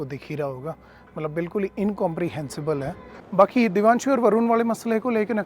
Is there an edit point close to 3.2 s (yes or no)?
yes